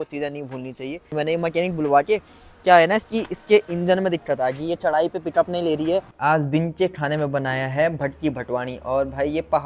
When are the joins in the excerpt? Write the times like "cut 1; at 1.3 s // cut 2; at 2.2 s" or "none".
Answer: cut 1; at 1.1 s // cut 2; at 6.1 s